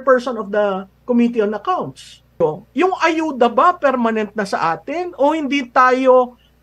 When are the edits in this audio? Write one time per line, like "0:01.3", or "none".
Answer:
0:02.4